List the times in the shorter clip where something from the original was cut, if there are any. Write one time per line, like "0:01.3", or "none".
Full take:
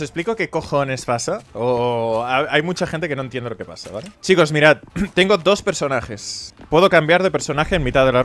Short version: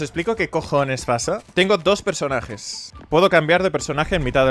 0:01.5